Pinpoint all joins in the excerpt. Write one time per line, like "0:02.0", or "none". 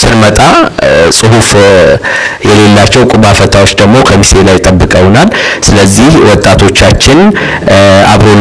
none